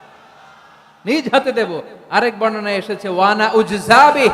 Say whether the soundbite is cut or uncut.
uncut